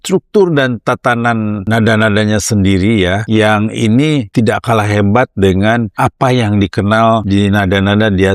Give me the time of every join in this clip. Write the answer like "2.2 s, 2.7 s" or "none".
1.6 s, 3.2 s, 4.3 s, 5.9 s, 7.2 s